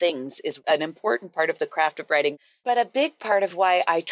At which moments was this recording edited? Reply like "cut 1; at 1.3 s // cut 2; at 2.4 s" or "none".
cut 1; at 2.3 s